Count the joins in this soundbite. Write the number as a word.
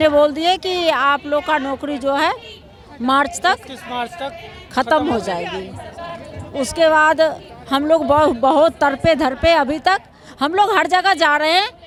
zero